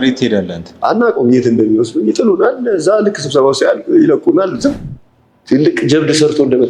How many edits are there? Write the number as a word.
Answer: one